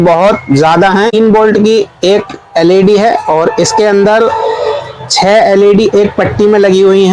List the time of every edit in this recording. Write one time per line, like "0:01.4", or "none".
0:01.1

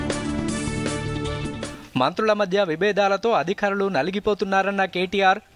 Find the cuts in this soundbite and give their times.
0:01.6

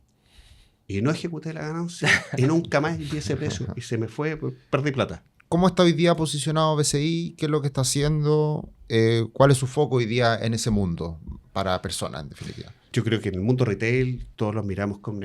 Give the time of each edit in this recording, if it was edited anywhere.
0:05.3
0:12.9
0:14.2

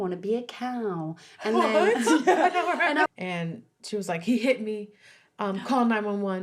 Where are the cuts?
0:03.1

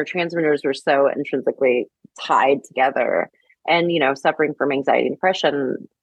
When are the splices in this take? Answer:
none

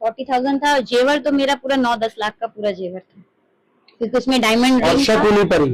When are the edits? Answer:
none

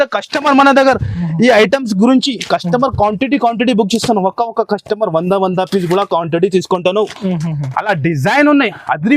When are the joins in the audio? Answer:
none

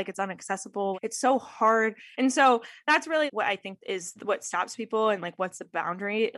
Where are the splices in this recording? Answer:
0:02.0

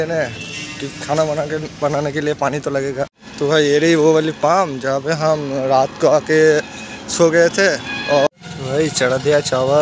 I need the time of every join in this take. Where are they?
0:03.2
0:08.3

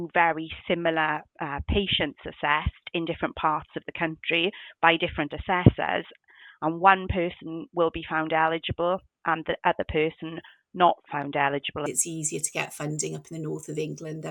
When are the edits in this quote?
0:11.8

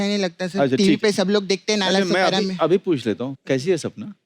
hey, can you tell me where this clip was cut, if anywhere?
0:03.3

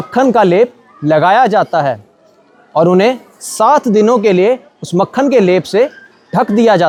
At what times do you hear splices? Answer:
none

